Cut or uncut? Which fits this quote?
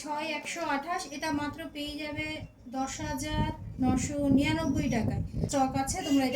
cut